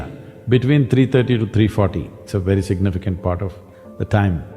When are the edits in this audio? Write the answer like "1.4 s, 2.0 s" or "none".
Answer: 2.2 s